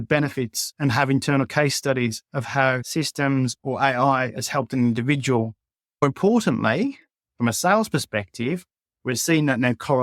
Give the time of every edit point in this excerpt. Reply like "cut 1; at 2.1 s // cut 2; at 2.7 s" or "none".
cut 1; at 2.9 s // cut 2; at 6.0 s